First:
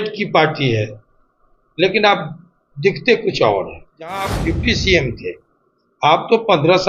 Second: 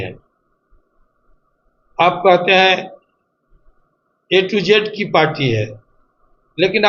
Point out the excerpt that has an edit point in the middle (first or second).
first